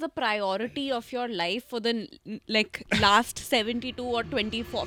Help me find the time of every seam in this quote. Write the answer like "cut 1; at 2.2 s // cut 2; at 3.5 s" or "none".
none